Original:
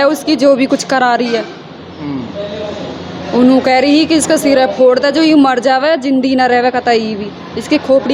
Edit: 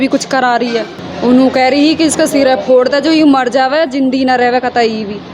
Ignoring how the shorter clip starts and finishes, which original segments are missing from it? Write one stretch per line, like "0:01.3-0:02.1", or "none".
0:01.6-0:03.1